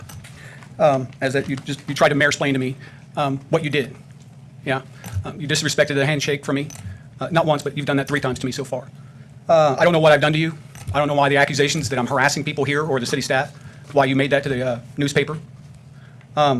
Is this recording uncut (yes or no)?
yes